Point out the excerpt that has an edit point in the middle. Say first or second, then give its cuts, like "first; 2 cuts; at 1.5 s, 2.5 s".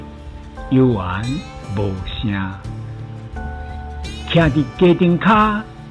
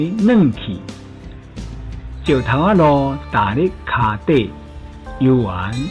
first; 2 cuts; at 2.6 s, 4.3 s